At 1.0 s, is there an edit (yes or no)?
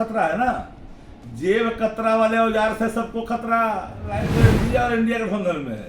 no